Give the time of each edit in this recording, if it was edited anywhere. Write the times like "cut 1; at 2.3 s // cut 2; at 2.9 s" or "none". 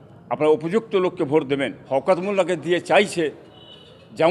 cut 1; at 1.8 s